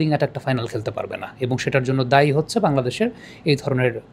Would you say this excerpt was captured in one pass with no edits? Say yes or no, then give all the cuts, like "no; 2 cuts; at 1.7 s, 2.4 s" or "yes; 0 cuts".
yes; 0 cuts